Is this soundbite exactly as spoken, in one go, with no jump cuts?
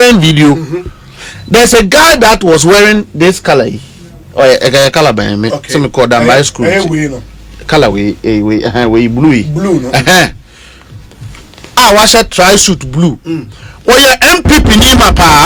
yes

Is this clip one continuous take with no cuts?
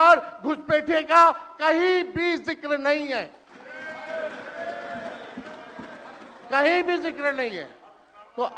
yes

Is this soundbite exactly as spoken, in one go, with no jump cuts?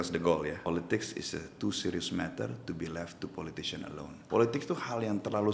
no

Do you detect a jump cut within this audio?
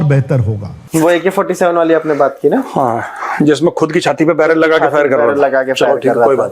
yes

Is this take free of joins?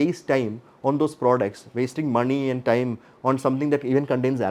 yes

